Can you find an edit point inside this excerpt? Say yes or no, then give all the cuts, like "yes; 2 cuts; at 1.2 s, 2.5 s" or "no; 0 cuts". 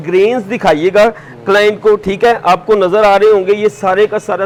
no; 0 cuts